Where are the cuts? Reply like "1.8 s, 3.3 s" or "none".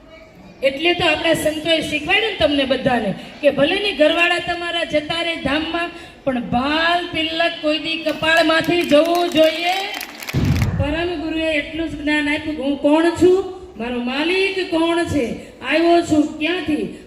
10.6 s